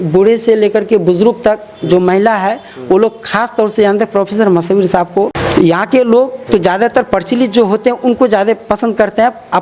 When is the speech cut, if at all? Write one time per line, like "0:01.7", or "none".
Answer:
0:05.4
0:06.4